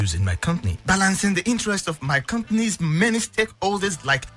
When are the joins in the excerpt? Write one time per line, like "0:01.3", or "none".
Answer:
0:02.8